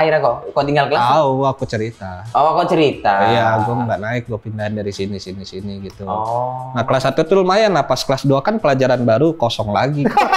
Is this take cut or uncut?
uncut